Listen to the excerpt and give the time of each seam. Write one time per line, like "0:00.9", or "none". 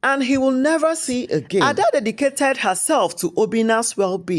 0:01.7